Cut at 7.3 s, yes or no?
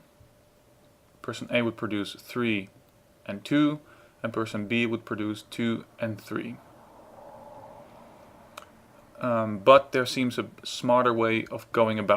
no